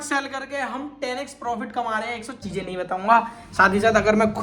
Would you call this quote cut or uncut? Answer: cut